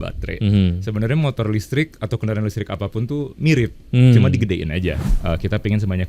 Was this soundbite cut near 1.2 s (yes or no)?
no